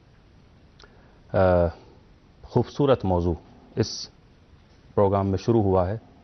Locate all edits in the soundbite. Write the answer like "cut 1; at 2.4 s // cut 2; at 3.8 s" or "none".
cut 1; at 1.6 s